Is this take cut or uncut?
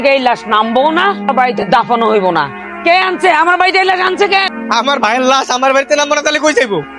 cut